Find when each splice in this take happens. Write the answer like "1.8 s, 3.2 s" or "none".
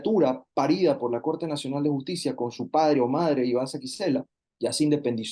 4.4 s